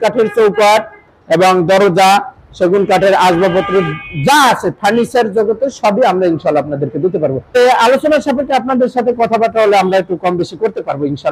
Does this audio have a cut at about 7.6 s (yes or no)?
yes